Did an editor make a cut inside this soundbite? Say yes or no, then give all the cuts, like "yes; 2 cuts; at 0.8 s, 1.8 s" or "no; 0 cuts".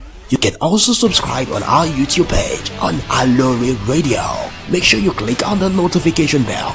no; 0 cuts